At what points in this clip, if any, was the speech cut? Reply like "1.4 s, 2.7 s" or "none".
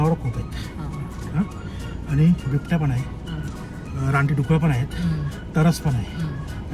none